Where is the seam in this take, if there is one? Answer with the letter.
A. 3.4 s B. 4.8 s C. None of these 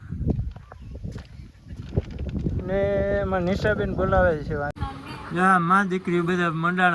B